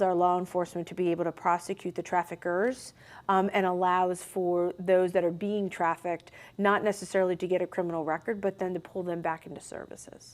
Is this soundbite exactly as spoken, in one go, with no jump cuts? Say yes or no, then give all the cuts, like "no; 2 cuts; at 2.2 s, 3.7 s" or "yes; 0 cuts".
yes; 0 cuts